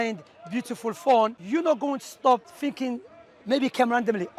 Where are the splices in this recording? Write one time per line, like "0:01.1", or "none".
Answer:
0:01.4
0:02.5